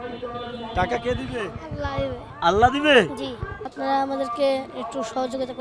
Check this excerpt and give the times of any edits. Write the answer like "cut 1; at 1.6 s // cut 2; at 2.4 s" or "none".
cut 1; at 3.6 s